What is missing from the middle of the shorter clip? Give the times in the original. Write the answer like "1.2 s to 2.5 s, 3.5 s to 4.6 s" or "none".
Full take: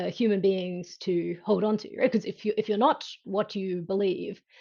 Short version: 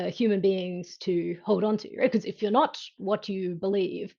2.4 s to 2.7 s